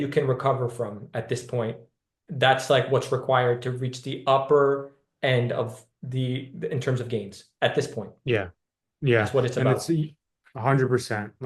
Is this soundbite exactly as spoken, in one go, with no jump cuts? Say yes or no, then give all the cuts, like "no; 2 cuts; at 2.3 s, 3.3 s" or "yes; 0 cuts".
yes; 0 cuts